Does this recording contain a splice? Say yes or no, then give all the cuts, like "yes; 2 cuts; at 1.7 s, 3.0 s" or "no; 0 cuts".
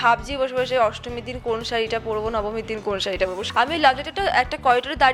yes; 1 cut; at 3.4 s